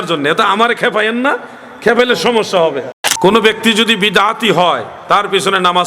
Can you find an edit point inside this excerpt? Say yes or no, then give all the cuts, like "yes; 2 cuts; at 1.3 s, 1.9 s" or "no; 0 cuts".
yes; 1 cut; at 2.9 s